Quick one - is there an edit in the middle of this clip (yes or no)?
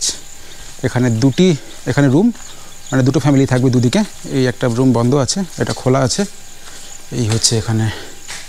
no